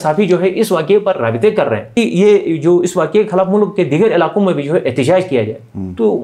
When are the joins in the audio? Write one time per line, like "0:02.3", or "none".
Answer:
0:01.9